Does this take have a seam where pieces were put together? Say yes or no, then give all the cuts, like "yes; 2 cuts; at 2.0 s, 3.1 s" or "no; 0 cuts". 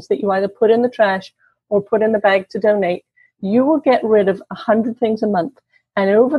no; 0 cuts